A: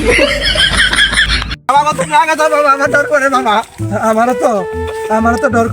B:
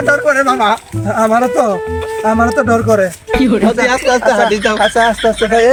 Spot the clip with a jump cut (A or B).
A